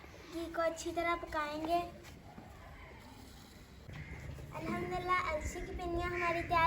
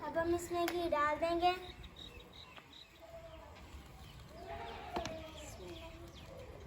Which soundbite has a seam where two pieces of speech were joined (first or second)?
first